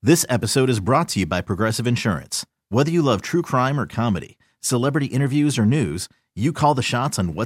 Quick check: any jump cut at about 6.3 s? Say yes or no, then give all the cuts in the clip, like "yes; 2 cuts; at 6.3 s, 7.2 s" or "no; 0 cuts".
no; 0 cuts